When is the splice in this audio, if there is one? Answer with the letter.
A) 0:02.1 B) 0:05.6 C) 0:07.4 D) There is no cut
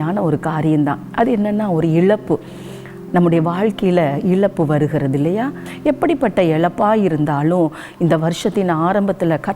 B